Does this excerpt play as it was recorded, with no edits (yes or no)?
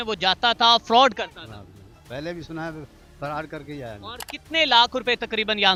yes